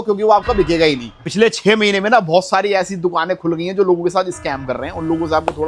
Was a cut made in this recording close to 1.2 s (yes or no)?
yes